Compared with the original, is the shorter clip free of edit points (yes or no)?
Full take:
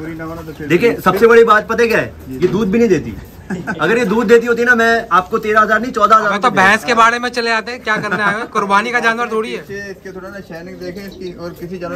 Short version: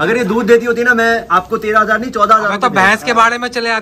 yes